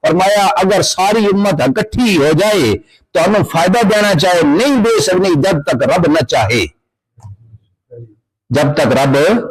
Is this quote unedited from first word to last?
yes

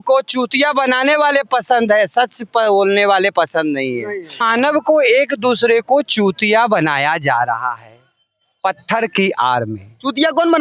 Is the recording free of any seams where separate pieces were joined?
no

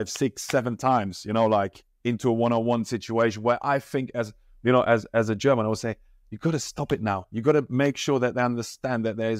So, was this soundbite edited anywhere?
no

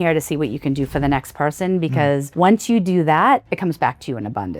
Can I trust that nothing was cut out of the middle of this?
no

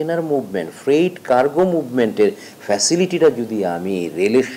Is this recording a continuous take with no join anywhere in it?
yes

